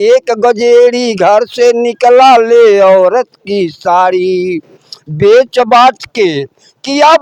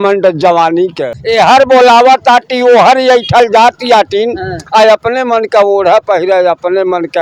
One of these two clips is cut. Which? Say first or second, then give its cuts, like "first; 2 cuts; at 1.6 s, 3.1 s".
second; 1 cut; at 1.1 s